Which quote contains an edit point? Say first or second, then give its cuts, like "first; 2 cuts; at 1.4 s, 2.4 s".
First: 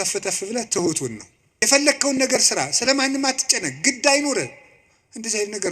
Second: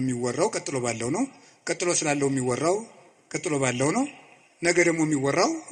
first; 1 cut; at 1.4 s